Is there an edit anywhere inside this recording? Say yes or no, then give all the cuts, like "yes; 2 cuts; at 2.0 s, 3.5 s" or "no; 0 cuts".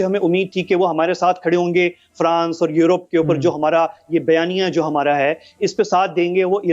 no; 0 cuts